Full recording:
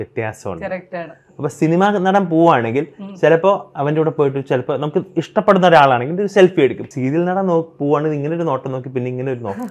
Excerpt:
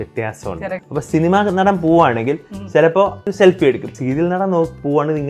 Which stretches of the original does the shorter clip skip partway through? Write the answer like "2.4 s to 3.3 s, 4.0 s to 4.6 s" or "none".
0.8 s to 1.3 s, 3.7 s to 6.2 s